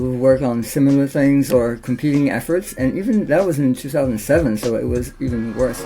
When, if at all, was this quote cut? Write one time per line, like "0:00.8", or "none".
none